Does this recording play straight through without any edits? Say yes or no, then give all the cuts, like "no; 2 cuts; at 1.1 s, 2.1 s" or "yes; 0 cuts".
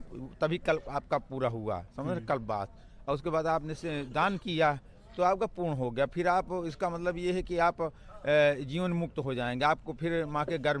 yes; 0 cuts